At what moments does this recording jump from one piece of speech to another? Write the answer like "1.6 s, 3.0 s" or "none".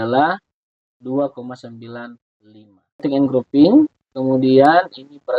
3.0 s